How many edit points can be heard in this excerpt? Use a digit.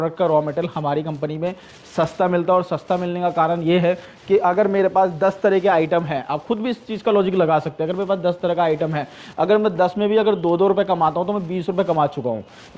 0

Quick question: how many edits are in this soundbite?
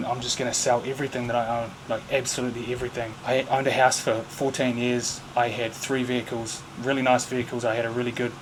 0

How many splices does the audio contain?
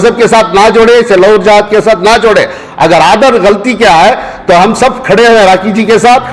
0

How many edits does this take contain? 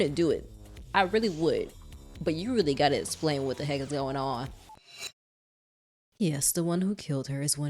1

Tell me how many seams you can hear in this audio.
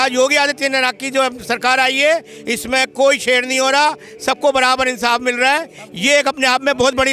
0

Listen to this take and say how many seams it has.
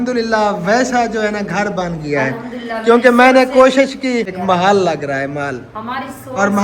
1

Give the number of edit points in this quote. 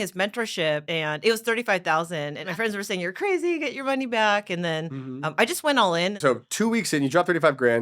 3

